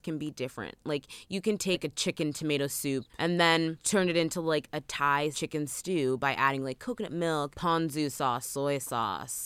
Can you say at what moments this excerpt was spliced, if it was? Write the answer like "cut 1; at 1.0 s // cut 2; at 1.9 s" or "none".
cut 1; at 1.8 s // cut 2; at 3.1 s // cut 3; at 3.8 s // cut 4; at 5.4 s // cut 5; at 7.5 s